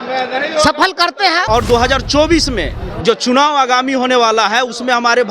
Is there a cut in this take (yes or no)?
yes